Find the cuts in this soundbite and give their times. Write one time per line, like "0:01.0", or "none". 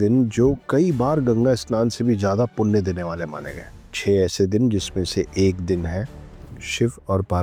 none